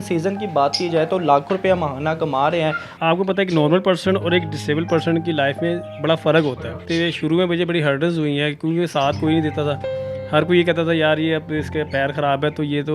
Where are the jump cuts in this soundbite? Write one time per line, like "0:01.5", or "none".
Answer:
0:02.9
0:06.7

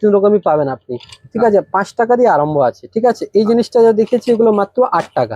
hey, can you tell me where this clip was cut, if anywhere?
none

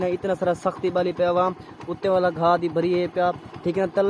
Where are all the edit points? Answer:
none

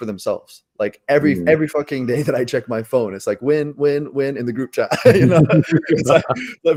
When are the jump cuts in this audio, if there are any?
none

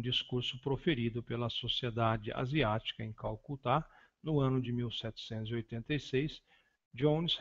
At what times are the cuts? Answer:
none

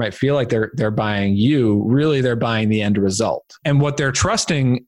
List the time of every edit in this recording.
0:03.6

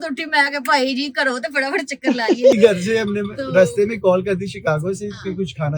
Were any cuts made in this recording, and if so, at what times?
0:02.5

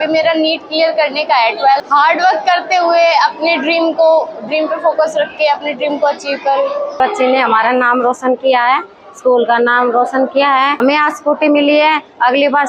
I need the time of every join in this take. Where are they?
0:01.8
0:07.0
0:10.8

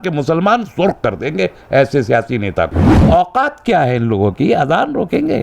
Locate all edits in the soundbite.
0:02.9

